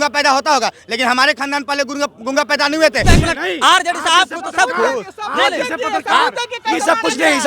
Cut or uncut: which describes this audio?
cut